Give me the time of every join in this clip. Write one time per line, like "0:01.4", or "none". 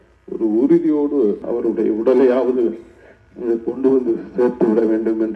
0:01.4